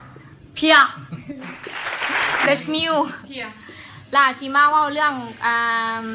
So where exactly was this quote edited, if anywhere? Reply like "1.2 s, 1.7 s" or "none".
3.0 s